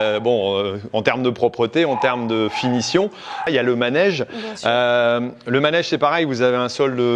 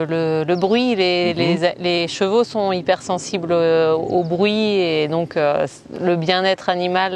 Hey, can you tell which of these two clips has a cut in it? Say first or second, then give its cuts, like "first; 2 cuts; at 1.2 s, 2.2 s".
first; 1 cut; at 3.5 s